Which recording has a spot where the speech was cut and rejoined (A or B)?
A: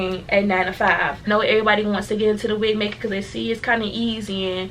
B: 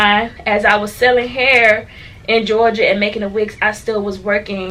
A